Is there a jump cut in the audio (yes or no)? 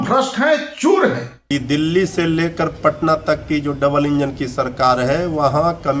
yes